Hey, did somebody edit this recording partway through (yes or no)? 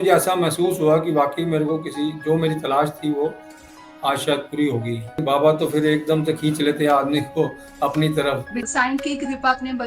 yes